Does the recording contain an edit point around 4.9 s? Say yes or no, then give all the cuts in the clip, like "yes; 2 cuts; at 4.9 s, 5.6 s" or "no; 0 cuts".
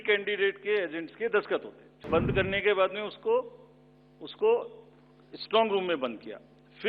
no; 1 cut; at 2.1 s